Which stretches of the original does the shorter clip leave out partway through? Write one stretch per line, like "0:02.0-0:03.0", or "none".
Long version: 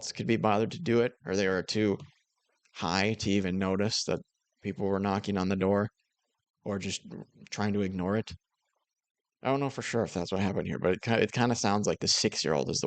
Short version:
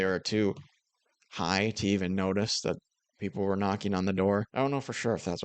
0:05.9-0:09.4